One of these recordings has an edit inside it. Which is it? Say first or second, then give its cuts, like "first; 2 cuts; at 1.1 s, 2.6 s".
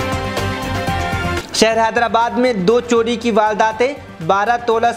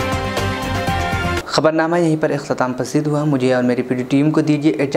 first; 1 cut; at 1.3 s